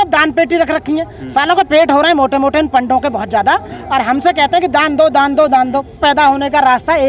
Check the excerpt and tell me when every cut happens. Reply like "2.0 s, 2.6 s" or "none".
6.0 s